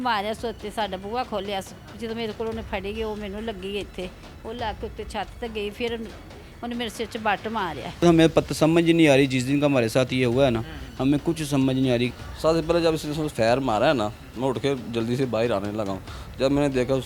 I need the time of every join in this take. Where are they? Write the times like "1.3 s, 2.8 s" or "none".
1.8 s, 8.0 s, 12.1 s